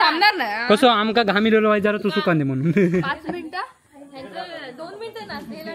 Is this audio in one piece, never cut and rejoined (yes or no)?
yes